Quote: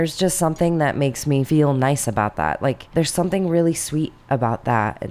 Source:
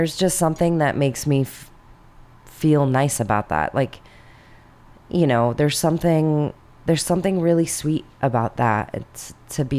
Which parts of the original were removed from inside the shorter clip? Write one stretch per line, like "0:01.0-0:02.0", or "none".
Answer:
0:01.5-0:02.6
0:04.0-0:06.8

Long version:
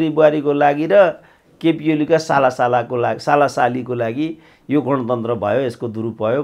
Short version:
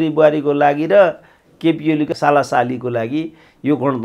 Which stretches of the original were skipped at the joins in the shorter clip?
0:02.1-0:03.1

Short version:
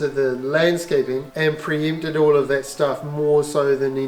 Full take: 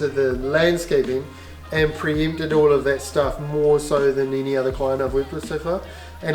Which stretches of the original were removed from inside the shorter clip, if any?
0:01.3-0:01.6

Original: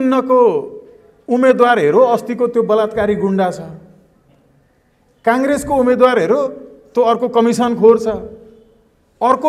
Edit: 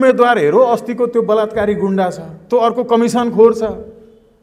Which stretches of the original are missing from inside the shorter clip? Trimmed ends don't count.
0:03.7-0:06.7

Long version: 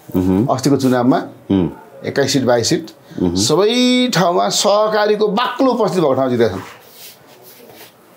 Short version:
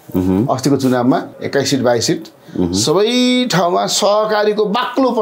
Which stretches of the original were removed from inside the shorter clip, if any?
0:01.3-0:02.0

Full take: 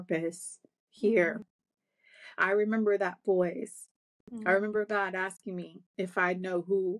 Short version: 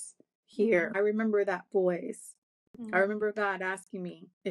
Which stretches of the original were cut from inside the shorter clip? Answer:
0:01.4-0:02.5

